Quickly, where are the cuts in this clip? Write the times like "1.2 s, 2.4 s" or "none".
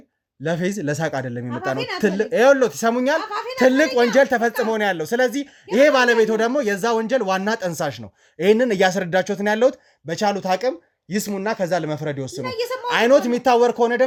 none